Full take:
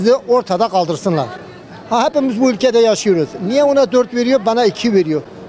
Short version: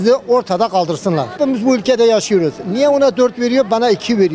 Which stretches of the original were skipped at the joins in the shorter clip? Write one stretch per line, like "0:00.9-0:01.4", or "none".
0:01.4-0:02.1

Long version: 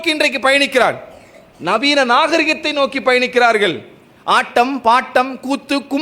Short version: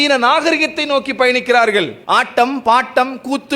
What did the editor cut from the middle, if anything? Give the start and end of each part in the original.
0:03.8-0:04.2

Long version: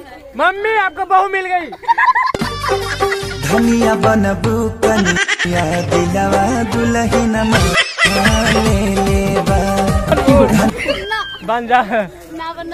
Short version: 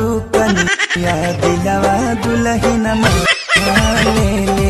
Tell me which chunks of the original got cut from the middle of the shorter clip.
none

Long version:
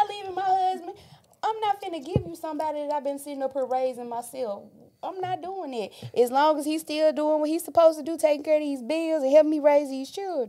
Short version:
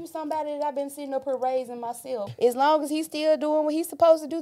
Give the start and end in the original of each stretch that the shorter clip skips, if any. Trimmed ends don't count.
0:04.6-0:06.1

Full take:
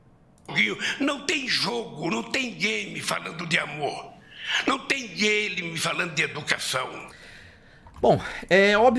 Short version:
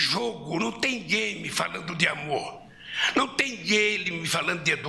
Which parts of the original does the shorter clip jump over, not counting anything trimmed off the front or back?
none

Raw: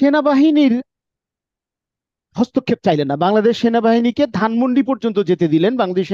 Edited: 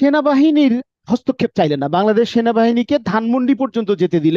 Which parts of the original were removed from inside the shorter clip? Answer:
0:00.9-0:02.2

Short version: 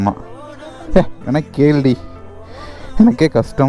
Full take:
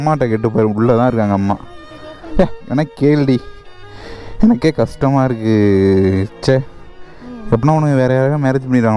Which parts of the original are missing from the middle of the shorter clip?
none

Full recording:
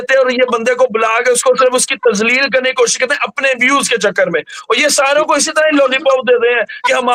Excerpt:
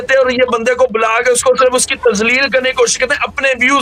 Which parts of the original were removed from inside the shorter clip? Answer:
none

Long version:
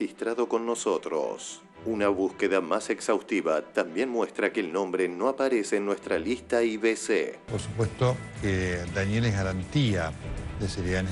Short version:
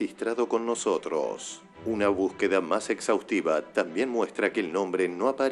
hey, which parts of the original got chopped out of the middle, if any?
none

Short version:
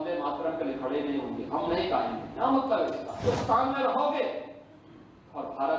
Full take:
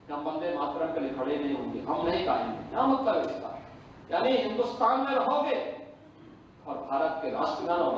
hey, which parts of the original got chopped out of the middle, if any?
0:03.6-0:04.5

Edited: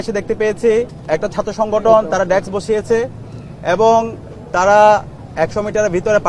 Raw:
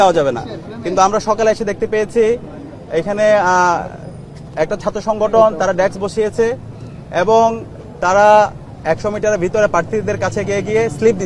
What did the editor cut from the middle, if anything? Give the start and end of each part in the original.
0:02.5-0:04.4

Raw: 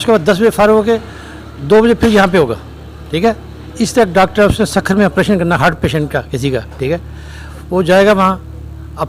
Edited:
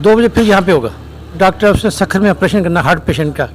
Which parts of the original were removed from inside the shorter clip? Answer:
0:03.0-0:04.1

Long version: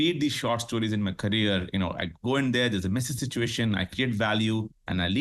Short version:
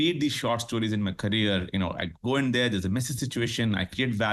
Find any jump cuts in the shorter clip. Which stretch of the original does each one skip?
none

